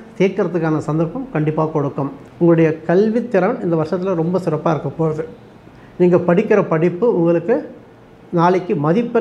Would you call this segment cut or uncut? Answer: cut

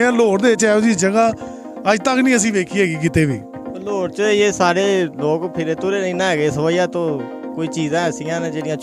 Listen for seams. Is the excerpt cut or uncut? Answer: uncut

